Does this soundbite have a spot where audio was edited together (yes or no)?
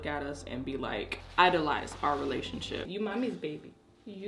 yes